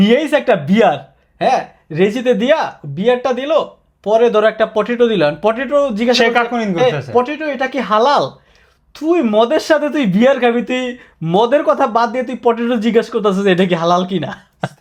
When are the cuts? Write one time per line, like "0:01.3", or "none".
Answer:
none

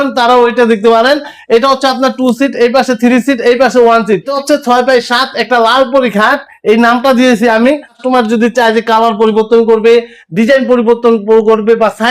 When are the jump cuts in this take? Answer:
0:04.3
0:08.0

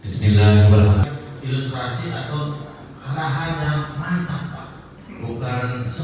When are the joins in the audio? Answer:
0:01.0

